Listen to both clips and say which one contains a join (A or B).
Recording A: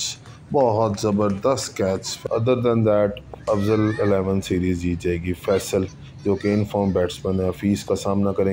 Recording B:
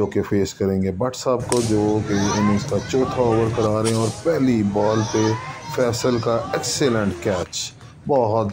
A